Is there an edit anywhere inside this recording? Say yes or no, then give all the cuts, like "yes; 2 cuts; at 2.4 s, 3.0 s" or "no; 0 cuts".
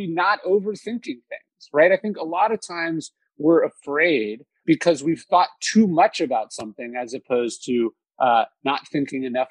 yes; 1 cut; at 4.5 s